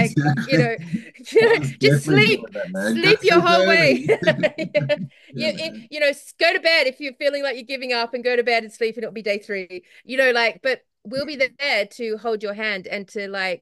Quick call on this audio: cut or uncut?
uncut